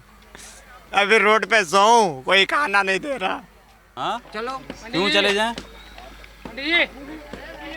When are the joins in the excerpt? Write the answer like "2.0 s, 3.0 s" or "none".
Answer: 3.9 s